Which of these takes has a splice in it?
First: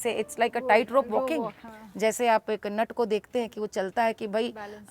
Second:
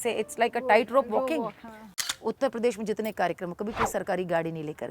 second; 1 cut; at 1.9 s

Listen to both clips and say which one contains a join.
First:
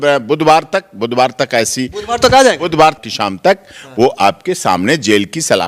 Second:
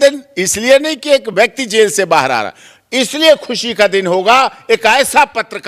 first; 1 cut; at 3.0 s

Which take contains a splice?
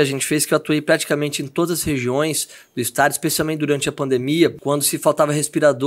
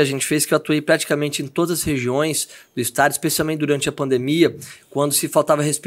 first; 1 cut; at 4.6 s

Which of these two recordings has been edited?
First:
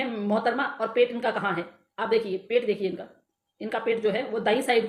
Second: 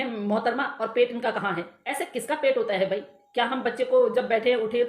second; 1 cut; at 1.8 s

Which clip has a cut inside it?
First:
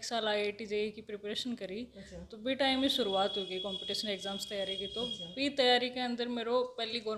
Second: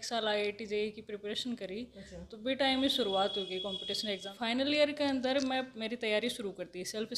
second; 1 cut; at 4.3 s

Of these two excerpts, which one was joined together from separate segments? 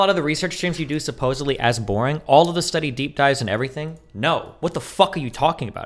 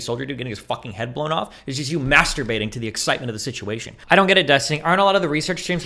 second; 1 cut; at 3.9 s

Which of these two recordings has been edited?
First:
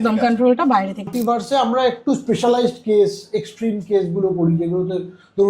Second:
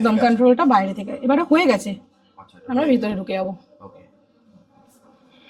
first; 1 cut; at 1.1 s

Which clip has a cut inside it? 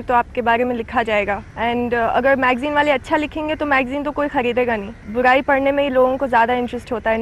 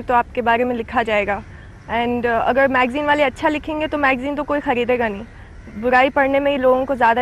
first; 2 cuts; at 1.5 s, 5.0 s

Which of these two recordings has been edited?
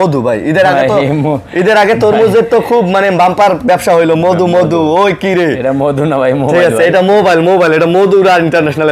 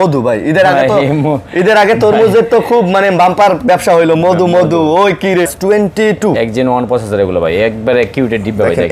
second; 1 cut; at 5.5 s

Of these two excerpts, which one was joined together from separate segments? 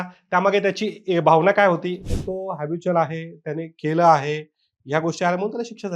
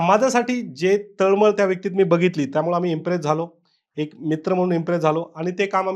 first; 1 cut; at 2.0 s

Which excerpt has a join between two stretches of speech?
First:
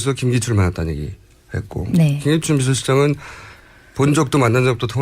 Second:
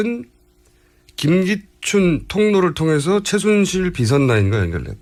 first; 1 cut; at 2.6 s

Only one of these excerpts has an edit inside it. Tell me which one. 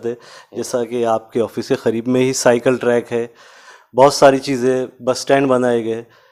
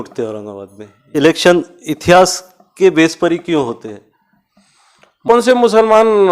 second; 2 cuts; at 1.1 s, 5.3 s

